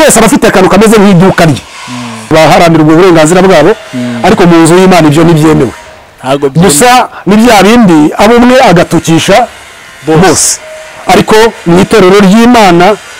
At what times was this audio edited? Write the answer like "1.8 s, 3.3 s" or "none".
2.3 s